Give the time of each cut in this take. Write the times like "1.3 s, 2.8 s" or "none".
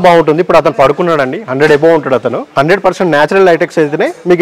2.4 s